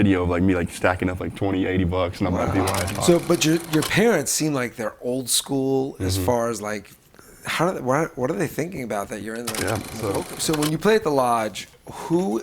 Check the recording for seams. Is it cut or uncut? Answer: cut